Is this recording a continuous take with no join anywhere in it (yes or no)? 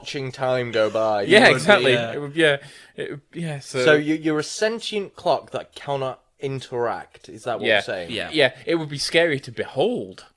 yes